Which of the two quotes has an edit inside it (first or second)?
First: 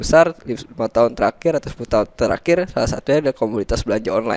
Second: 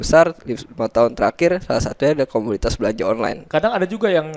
second